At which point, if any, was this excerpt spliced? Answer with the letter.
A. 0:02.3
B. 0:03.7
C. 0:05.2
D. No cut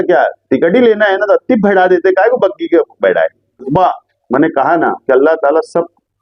B